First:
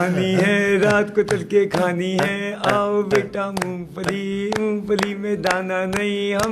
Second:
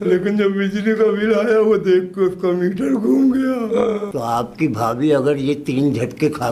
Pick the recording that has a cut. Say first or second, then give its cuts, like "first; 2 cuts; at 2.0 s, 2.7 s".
second; 1 cut; at 4.1 s